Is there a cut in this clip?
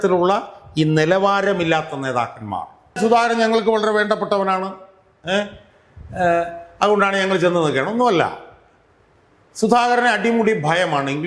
yes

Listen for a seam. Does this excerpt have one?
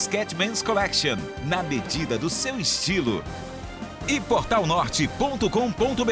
no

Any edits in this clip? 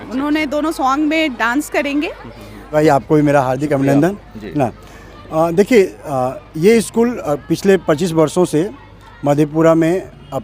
yes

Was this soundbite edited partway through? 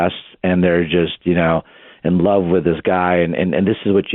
no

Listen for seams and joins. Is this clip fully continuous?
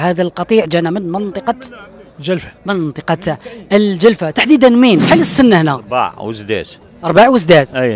no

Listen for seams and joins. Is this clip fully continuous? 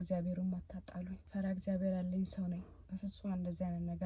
no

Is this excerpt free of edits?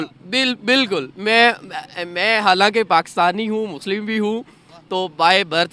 yes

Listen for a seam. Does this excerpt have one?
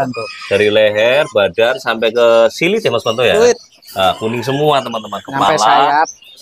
no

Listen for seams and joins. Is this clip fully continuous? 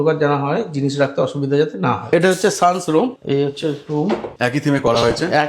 no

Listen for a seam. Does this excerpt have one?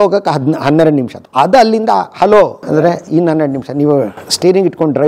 yes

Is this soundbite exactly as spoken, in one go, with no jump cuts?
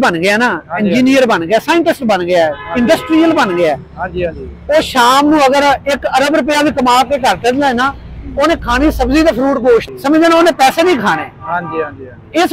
no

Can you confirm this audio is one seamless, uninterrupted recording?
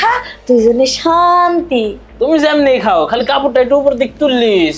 no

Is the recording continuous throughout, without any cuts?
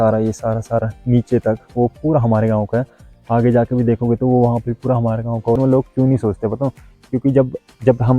no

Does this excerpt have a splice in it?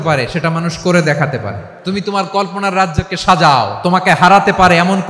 yes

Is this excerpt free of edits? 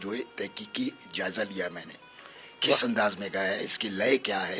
yes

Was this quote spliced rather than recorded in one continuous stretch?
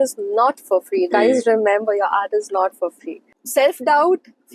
yes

